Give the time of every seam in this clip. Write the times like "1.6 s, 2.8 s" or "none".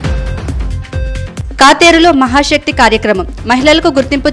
1.2 s